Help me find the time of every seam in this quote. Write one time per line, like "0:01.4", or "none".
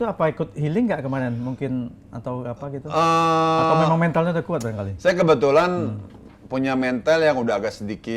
none